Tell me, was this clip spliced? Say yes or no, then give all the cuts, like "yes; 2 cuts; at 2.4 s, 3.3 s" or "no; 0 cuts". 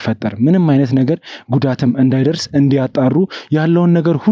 no; 0 cuts